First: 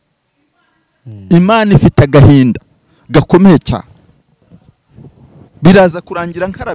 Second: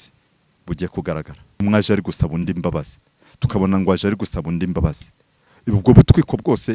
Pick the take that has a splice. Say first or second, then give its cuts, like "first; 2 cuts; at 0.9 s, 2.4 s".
second; 1 cut; at 1.6 s